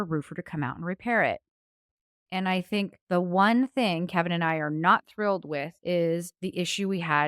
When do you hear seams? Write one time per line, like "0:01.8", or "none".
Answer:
0:02.4
0:05.7
0:06.4